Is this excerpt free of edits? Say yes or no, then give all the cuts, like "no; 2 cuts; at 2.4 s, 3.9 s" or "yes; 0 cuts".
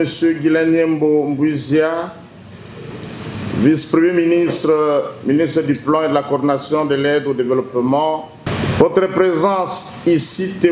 no; 1 cut; at 8.5 s